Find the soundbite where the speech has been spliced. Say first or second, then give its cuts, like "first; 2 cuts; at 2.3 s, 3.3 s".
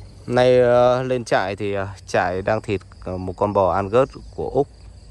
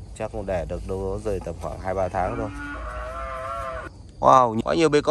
second; 1 cut; at 3.8 s